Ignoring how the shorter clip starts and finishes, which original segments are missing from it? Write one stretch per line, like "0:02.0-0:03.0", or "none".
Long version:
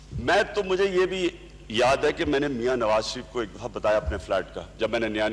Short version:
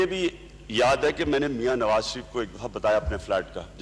none